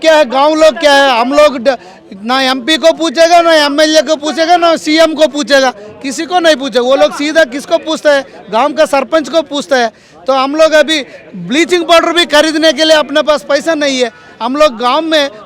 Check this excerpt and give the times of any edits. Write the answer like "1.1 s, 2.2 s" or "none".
none